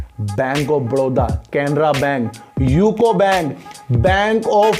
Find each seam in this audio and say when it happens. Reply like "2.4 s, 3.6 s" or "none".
none